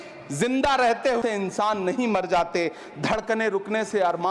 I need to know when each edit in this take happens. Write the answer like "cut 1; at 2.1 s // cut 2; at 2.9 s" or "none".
cut 1; at 1.2 s